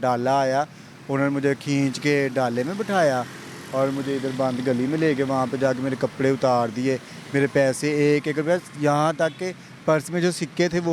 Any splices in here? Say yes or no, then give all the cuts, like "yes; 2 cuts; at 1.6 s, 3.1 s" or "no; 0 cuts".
no; 0 cuts